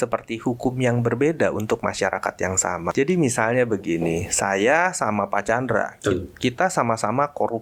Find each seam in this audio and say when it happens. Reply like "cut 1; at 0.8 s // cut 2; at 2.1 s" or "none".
cut 1; at 2.9 s